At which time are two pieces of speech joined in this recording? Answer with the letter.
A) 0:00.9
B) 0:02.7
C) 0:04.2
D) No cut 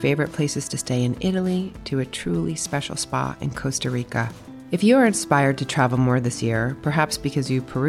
D